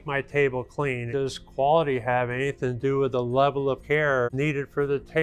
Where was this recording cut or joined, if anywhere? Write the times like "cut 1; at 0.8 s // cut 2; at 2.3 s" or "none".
cut 1; at 1.0 s // cut 2; at 4.0 s